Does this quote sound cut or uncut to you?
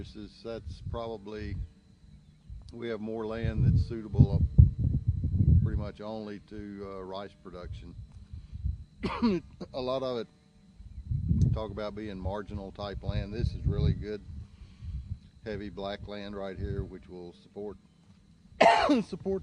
cut